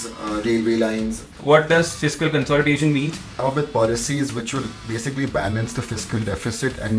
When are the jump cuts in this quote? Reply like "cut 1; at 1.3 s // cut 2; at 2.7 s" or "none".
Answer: cut 1; at 1.4 s // cut 2; at 3.4 s

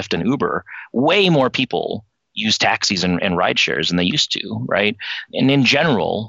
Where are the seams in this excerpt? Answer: cut 1; at 5.3 s

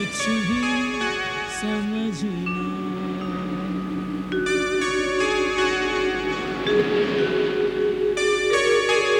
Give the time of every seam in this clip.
none

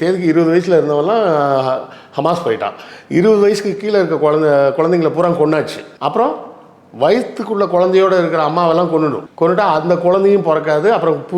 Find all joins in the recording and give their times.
cut 1; at 5.8 s // cut 2; at 9.2 s

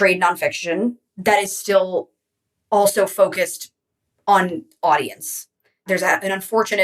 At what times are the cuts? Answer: cut 1; at 1.1 s // cut 2; at 5.8 s

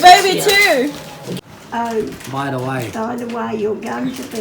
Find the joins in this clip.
cut 1; at 1.2 s

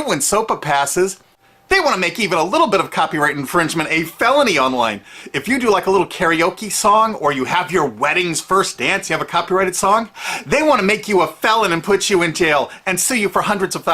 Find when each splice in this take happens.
cut 1; at 7.9 s

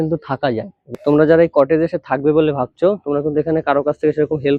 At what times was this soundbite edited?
cut 1; at 1.0 s

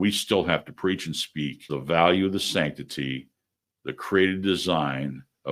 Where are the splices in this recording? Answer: none

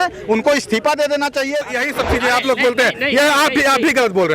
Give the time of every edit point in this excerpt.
cut 1; at 1.6 s

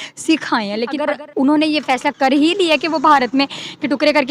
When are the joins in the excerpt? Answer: cut 1; at 1.0 s

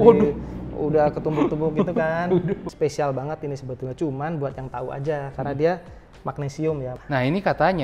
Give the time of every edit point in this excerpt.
cut 1; at 2.7 s // cut 2; at 6.9 s

